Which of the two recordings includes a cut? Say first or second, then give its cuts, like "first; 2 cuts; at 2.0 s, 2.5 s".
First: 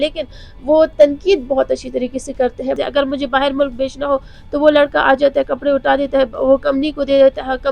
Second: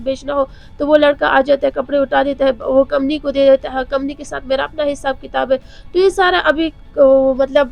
first; 1 cut; at 2.8 s